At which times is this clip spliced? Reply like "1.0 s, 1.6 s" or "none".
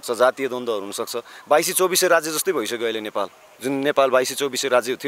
3.4 s